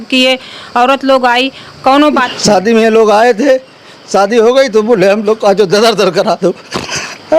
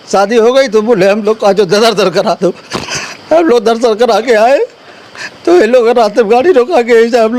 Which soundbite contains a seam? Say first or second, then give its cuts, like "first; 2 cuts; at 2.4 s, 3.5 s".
first; 1 cut; at 2.3 s